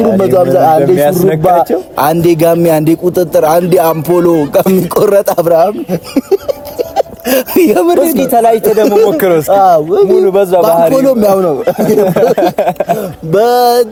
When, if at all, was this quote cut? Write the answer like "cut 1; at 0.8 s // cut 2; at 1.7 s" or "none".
none